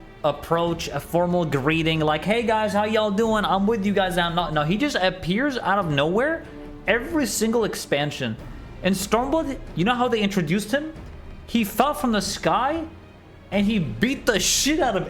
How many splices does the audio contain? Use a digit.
0